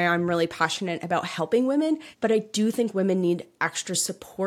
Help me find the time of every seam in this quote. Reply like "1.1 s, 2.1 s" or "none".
2.1 s